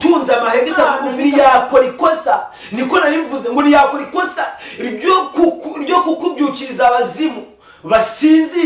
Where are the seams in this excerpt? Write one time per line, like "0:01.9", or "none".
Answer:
0:01.1

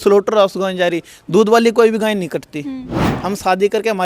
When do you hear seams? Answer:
0:03.1

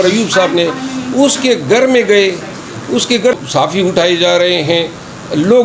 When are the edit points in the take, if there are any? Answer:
0:03.4

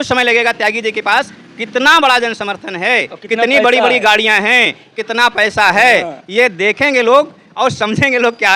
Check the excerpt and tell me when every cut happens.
none

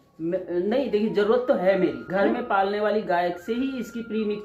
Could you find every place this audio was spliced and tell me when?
0:02.0

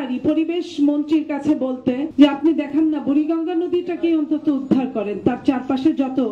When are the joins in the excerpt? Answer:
none

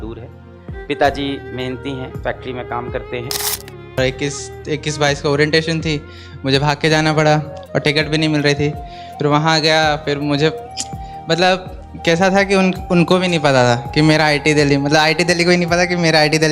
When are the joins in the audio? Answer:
0:03.7

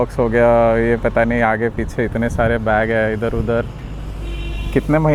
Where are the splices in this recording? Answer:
none

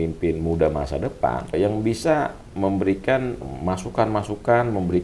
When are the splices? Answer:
0:01.5
0:03.5

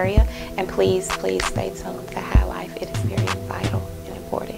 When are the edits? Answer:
none

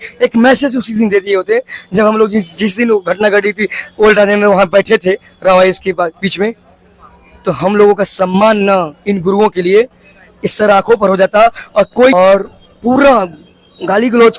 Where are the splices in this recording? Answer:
0:12.1

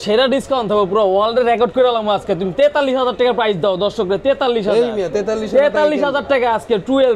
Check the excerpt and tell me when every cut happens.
none

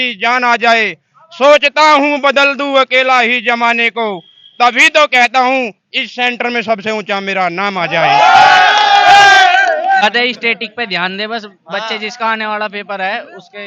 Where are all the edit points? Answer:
0:10.0

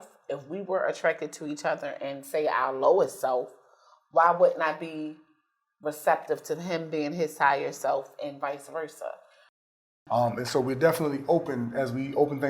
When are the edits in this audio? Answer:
0:09.6

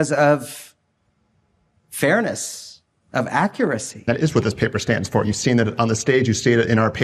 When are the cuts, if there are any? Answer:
0:04.1

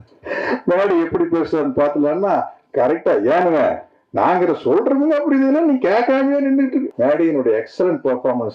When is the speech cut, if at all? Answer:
0:06.9

